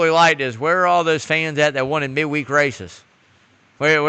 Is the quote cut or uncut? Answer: uncut